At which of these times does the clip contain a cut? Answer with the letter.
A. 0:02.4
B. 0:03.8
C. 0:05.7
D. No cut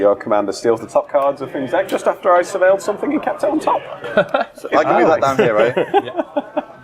D